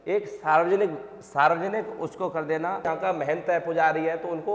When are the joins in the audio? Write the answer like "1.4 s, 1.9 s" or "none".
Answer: 2.9 s